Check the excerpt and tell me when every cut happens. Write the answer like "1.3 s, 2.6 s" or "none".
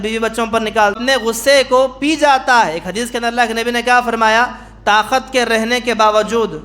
1.0 s